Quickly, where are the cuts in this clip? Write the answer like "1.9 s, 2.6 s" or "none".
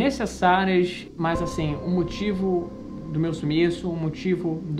1.0 s

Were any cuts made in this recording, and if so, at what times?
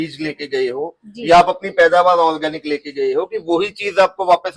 none

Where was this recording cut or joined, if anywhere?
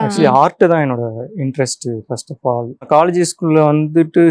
2.9 s

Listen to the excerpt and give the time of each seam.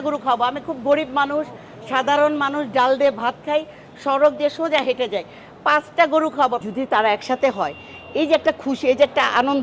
6.6 s

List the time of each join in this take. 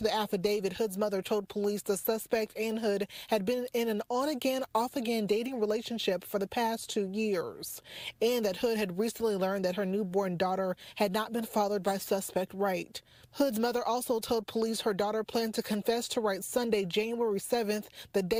none

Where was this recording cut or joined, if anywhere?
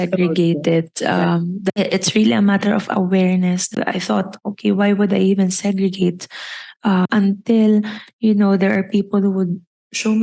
1.8 s, 3.6 s, 7.1 s

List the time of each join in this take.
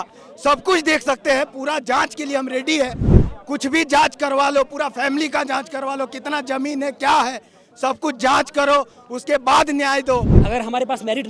10.3 s

